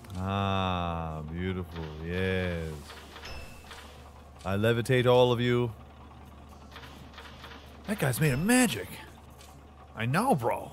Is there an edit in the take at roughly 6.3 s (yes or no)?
no